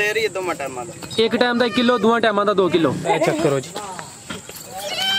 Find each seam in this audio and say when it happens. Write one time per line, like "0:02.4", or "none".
0:03.0